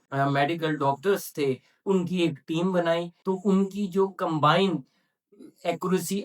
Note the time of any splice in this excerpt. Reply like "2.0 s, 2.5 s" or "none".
3.1 s